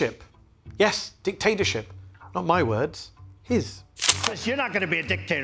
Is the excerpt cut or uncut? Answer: uncut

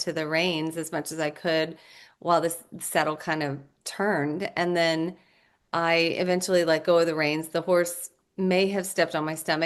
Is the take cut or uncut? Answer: uncut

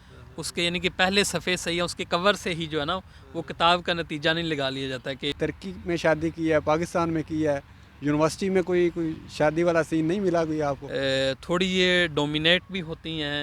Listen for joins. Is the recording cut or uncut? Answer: cut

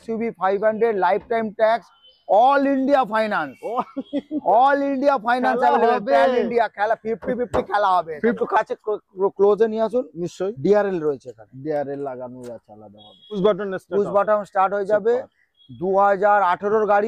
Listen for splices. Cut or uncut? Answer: cut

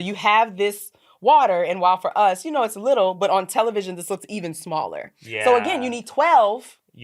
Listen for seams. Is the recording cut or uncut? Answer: uncut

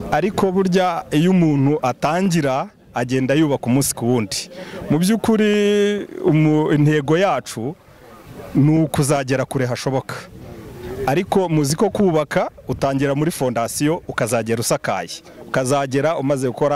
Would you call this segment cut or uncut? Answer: uncut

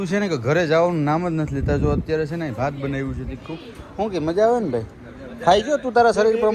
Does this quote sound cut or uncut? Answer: uncut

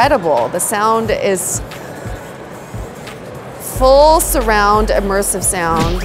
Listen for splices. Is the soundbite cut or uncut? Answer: uncut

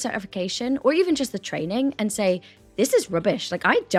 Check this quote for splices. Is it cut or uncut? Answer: uncut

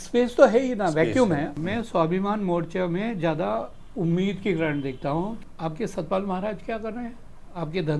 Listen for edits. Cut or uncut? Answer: cut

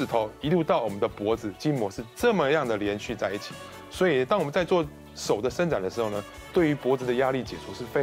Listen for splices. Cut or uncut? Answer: uncut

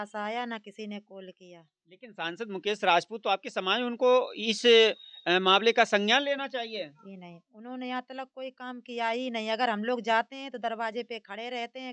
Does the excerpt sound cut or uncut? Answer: uncut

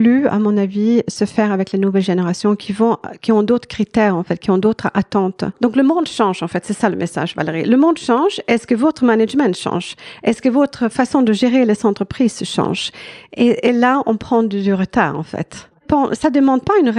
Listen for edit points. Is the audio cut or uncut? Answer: cut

